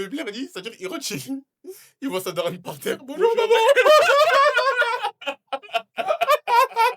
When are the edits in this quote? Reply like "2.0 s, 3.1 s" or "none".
none

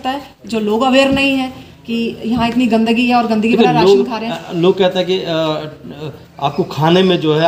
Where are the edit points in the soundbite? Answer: none

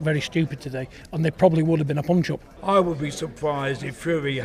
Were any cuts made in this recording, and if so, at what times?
2.5 s

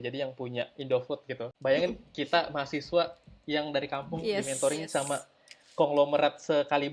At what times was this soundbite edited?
1.5 s

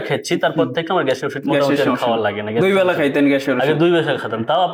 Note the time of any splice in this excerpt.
none

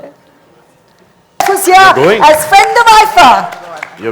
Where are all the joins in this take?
1.4 s

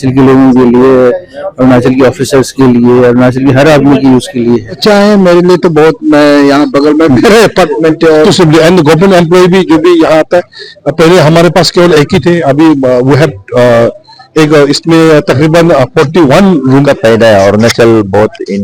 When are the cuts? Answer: 4.8 s, 8.2 s, 16.7 s

